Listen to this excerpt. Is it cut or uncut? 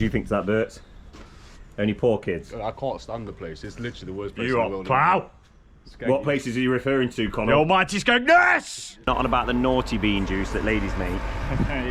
cut